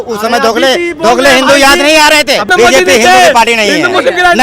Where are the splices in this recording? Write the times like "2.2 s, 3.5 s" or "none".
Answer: 2.5 s

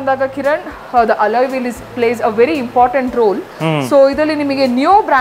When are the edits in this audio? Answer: none

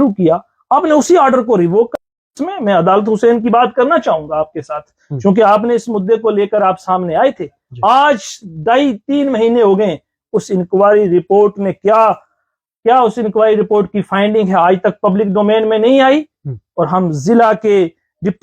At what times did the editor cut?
2.4 s

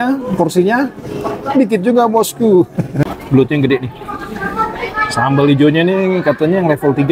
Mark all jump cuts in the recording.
3.0 s

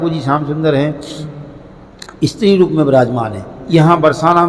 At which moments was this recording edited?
none

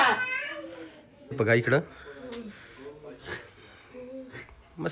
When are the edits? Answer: 1.3 s

